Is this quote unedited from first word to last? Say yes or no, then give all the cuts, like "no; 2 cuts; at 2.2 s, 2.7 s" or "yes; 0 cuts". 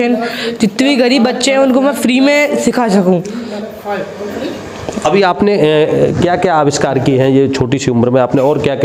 yes; 0 cuts